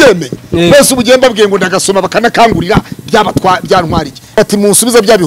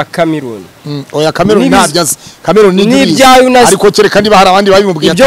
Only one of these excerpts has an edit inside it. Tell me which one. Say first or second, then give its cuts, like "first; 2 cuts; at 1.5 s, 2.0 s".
first; 1 cut; at 4.4 s